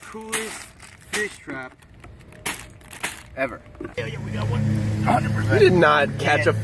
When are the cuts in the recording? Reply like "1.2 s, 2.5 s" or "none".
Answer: 4.1 s